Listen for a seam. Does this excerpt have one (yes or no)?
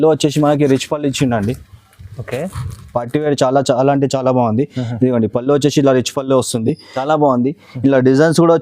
yes